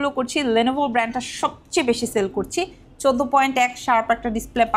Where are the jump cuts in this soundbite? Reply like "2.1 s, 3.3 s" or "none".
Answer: none

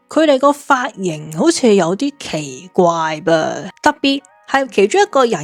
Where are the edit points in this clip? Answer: none

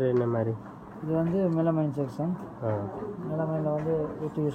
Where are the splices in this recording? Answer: none

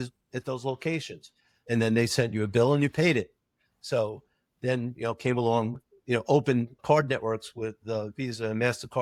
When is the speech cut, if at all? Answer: none

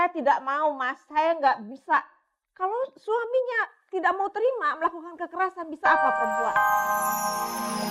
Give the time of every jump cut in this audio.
5.9 s

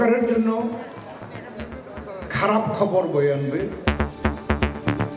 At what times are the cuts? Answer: 3.8 s

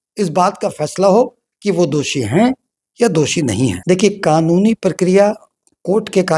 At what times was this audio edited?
3.8 s

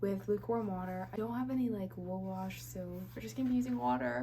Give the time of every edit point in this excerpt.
1.1 s

